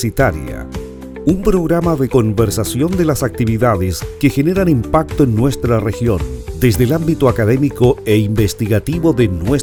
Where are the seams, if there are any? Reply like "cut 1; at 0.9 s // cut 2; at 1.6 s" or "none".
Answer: none